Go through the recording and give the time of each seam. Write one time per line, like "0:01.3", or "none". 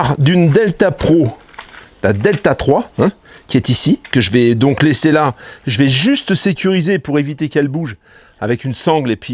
none